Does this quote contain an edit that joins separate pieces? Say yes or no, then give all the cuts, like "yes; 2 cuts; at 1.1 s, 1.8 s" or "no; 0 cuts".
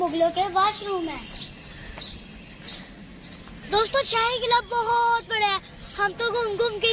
yes; 1 cut; at 3.6 s